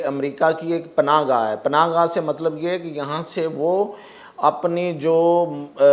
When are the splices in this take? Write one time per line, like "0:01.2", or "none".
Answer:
none